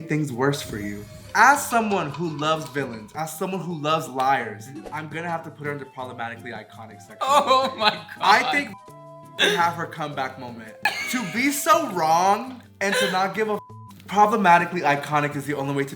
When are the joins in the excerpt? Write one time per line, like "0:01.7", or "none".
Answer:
0:01.2
0:10.8